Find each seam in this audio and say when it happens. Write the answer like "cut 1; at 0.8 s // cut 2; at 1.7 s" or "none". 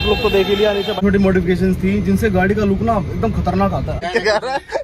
cut 1; at 1.0 s // cut 2; at 4.0 s